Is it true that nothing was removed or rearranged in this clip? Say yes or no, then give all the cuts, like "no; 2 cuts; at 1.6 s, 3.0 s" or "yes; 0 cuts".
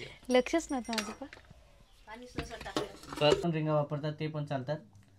no; 1 cut; at 3.4 s